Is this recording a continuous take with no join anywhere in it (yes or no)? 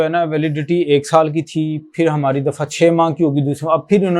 yes